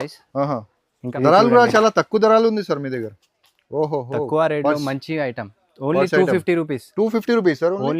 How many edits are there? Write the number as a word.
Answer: one